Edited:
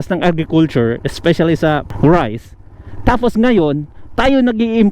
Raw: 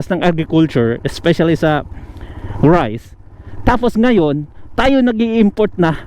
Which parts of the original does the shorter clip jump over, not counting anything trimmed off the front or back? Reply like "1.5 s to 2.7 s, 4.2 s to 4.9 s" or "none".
1.9 s to 2.5 s